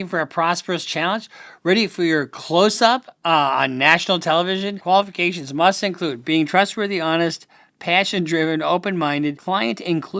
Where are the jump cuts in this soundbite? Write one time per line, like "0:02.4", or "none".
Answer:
0:04.8
0:09.4